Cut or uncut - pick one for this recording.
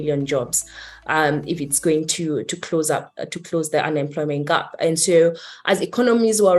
uncut